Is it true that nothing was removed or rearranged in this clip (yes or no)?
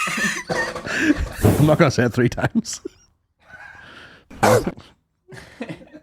no